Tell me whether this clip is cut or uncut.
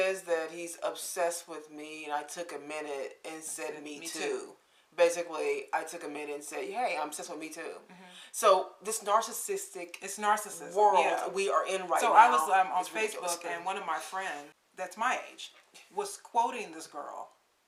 uncut